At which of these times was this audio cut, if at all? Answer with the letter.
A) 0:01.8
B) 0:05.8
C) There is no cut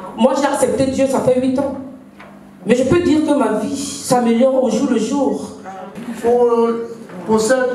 B